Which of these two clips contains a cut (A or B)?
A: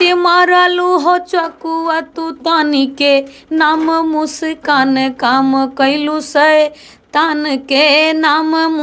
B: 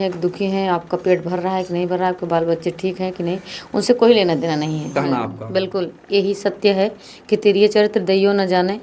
B